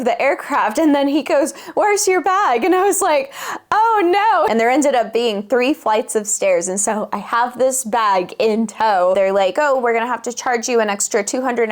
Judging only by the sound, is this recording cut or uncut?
cut